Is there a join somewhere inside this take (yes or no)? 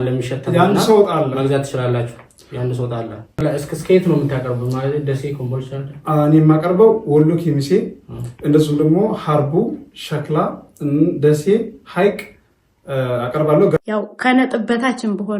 yes